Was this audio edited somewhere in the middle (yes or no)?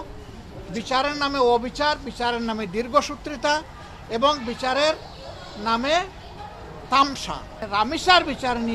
yes